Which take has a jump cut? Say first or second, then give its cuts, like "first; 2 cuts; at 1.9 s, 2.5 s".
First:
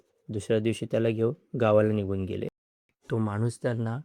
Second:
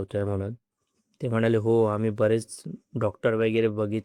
first; 1 cut; at 2.7 s